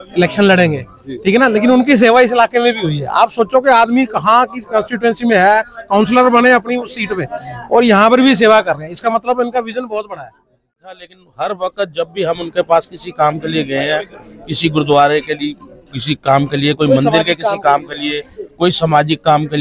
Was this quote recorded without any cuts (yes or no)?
no